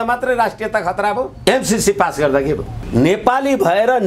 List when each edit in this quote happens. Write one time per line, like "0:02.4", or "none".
0:02.7